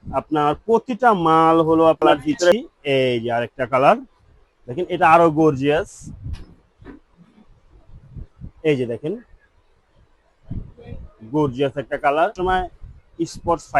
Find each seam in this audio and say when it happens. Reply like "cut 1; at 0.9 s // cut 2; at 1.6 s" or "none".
cut 1; at 2.5 s // cut 2; at 12.3 s